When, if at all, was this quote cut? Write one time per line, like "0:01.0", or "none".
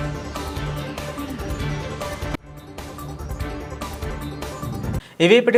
none